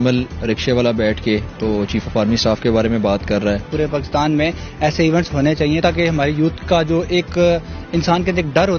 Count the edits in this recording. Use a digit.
1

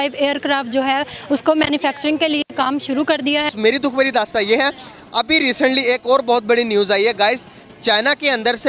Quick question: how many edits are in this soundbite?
1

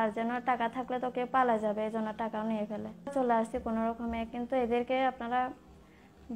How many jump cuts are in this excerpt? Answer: 1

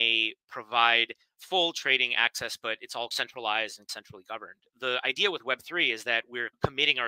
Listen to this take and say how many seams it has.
1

